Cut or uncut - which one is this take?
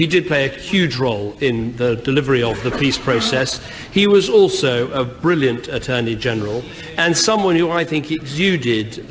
cut